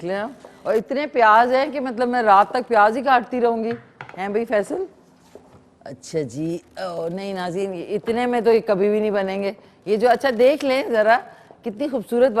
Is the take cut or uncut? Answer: uncut